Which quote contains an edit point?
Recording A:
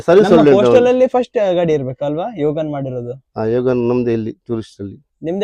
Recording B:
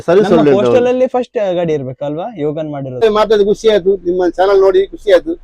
B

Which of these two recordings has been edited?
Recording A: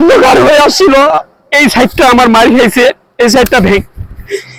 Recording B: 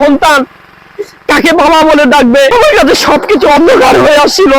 B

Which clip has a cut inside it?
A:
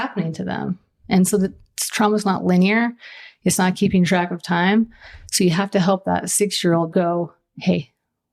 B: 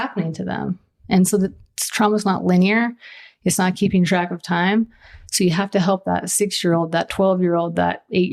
A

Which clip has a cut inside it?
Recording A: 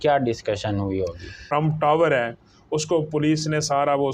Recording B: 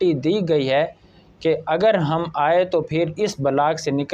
A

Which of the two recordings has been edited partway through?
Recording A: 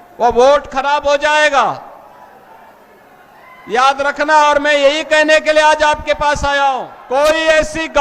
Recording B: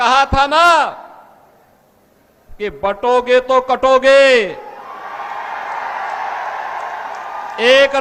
A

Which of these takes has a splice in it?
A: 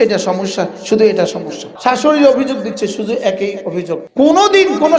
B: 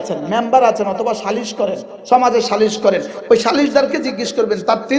A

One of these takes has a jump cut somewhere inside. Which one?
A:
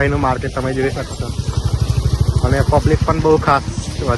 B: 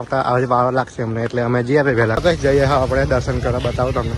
B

